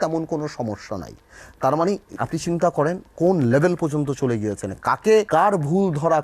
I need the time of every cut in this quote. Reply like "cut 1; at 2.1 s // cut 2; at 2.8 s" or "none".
cut 1; at 2.1 s // cut 2; at 5.3 s